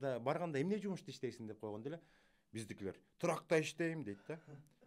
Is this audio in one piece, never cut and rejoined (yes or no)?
yes